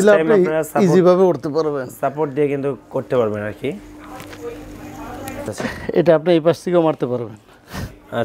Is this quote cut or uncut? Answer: cut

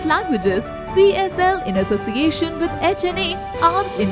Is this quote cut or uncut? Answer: uncut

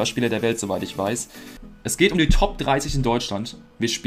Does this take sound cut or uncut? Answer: cut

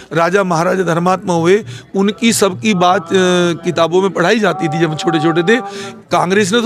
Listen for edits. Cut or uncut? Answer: uncut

